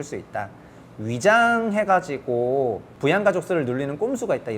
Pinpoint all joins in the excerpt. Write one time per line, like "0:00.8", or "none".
0:02.9